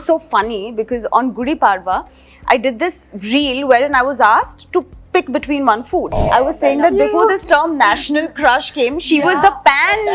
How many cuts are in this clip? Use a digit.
1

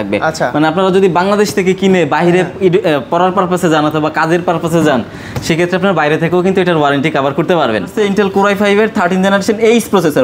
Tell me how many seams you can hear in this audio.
1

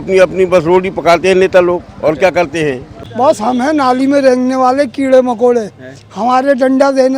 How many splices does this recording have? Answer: 1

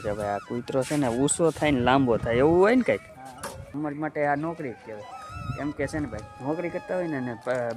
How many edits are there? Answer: 2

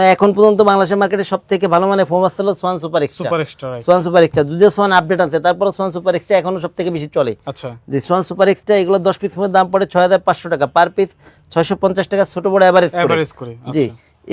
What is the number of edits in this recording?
0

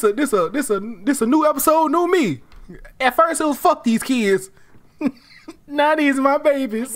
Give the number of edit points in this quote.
0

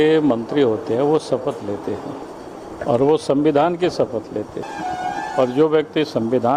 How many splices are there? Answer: 2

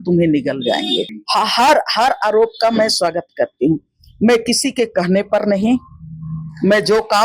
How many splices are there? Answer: 1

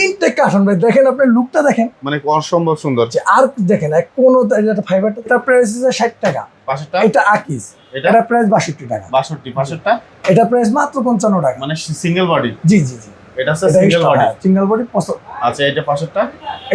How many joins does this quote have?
1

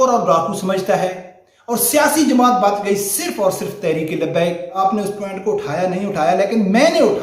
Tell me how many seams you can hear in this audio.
1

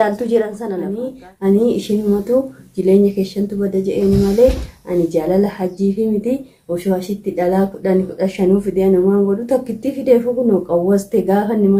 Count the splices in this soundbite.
1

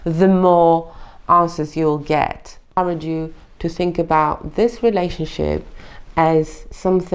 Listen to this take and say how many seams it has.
1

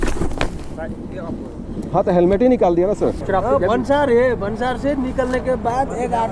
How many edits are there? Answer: 1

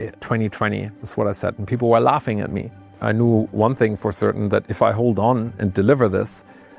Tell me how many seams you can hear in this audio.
1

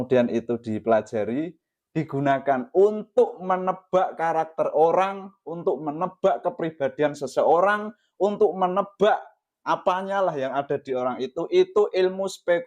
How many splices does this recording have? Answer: 0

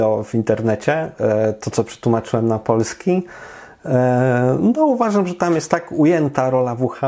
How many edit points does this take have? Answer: 0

